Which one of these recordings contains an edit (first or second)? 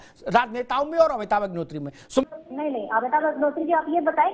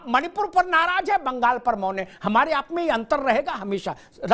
first